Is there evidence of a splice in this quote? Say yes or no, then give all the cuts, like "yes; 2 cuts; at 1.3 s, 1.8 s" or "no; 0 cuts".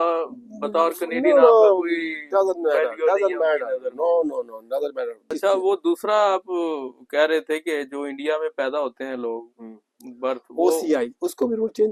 yes; 1 cut; at 5.2 s